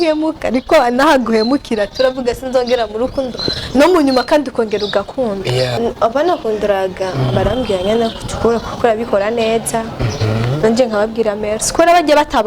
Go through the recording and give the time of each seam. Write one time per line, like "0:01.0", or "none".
0:05.8